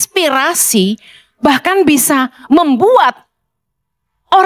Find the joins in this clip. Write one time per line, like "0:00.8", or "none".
none